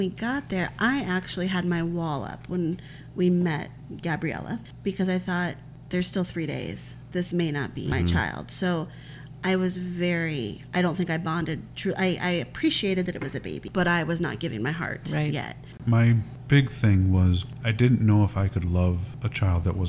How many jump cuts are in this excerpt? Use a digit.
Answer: 5